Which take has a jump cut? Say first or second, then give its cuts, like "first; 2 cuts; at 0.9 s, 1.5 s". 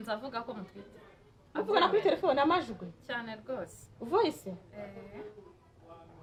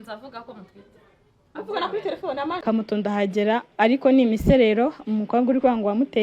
second; 1 cut; at 2.6 s